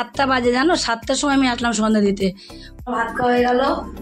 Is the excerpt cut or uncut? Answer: cut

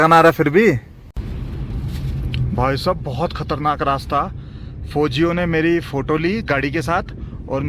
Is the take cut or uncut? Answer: cut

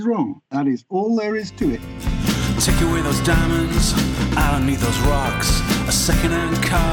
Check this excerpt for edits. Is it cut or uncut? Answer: cut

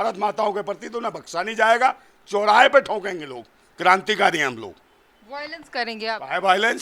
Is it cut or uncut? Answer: uncut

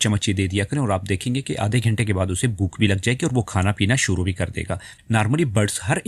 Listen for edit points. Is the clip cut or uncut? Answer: cut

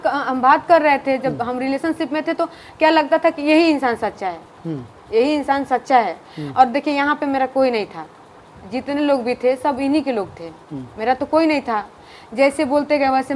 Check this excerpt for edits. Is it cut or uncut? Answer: uncut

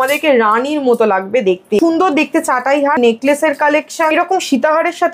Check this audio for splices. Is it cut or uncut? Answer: cut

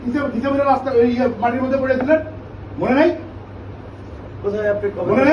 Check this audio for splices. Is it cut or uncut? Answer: uncut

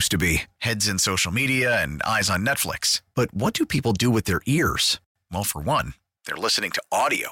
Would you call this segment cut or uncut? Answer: uncut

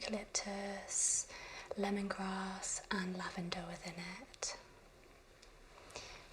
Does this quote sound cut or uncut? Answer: cut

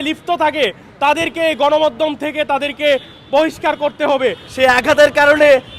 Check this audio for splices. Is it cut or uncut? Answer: cut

